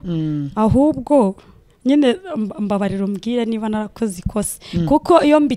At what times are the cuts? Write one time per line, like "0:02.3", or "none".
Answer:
none